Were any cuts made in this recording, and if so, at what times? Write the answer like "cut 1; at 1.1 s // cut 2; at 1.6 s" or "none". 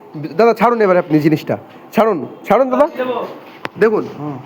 none